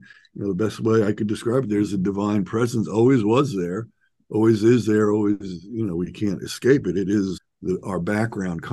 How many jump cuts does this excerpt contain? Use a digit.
1